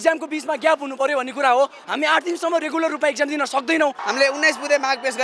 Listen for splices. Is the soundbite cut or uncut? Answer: cut